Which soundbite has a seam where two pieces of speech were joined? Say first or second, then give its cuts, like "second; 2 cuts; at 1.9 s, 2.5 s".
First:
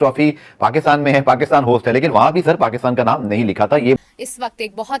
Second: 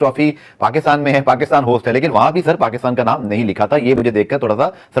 first; 1 cut; at 4.0 s